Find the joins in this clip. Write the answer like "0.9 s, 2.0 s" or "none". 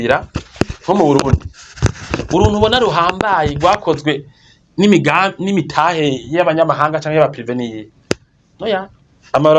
none